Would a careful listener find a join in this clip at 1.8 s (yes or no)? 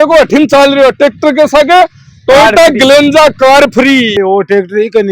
no